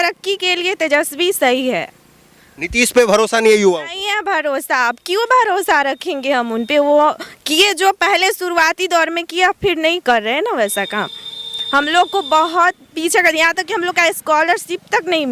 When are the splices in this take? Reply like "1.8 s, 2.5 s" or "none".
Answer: none